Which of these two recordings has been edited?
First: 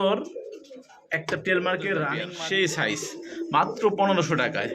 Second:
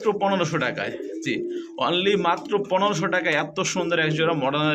first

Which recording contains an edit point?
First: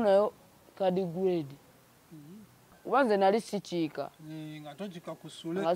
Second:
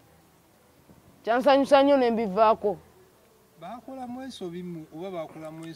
first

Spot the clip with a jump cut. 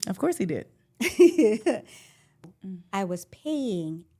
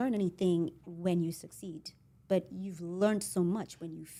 first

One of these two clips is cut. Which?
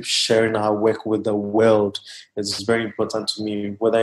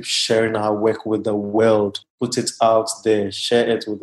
second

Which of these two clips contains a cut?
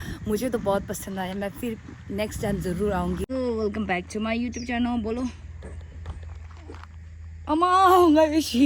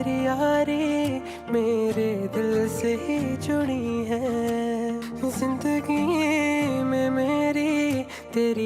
first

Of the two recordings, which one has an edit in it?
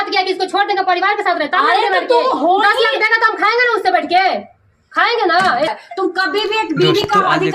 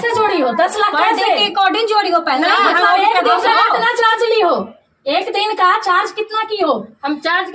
first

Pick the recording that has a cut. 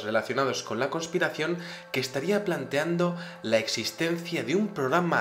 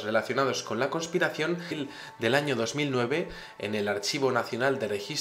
first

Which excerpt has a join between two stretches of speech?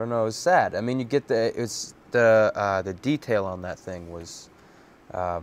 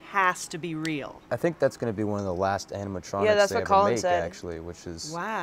first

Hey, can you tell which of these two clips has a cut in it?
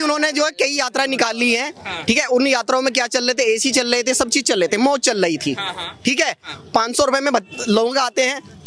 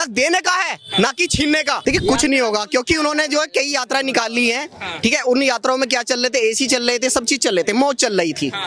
second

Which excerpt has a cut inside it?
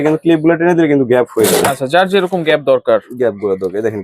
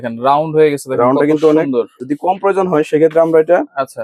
second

